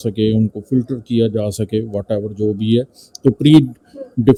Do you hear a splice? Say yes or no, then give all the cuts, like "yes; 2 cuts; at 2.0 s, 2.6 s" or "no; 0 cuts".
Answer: no; 0 cuts